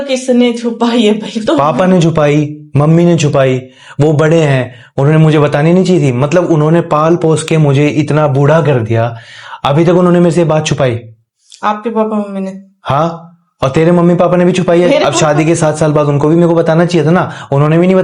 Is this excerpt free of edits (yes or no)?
yes